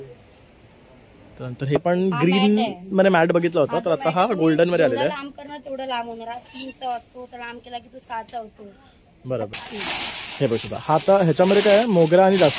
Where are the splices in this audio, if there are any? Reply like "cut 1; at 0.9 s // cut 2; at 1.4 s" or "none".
cut 1; at 1.8 s // cut 2; at 9.5 s